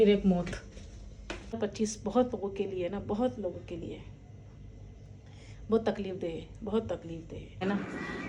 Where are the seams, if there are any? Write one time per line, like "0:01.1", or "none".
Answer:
0:01.6
0:07.6